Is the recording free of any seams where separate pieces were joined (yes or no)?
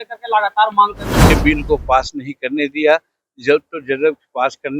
no